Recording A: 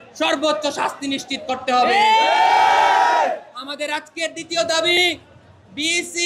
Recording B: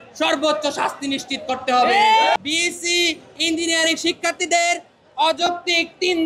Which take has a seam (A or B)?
B